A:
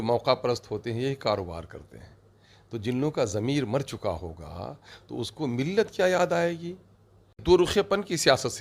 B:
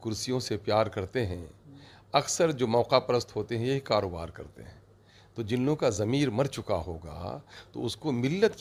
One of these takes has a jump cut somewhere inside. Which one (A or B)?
A